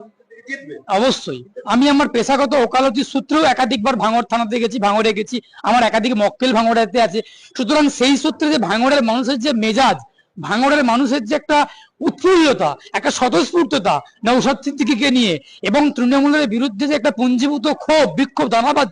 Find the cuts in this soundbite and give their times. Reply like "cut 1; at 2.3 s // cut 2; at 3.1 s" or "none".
cut 1; at 1.6 s